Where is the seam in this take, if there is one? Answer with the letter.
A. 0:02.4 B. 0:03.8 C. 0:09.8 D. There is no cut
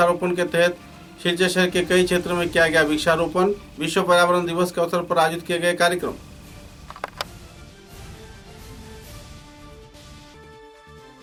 D